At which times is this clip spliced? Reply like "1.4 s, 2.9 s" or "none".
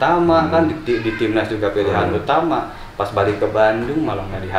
none